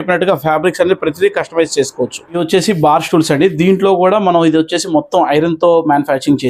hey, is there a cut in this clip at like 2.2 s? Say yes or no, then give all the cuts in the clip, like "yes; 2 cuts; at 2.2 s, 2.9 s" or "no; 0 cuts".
yes; 1 cut; at 2.2 s